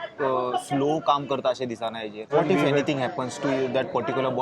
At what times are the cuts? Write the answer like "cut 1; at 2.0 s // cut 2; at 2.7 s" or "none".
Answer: cut 1; at 2.3 s